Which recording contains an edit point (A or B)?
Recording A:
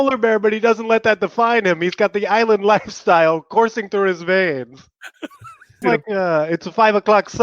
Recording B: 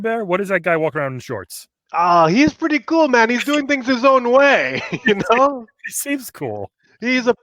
A